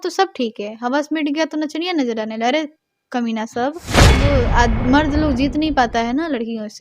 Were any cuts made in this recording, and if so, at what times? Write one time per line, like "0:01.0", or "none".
0:04.2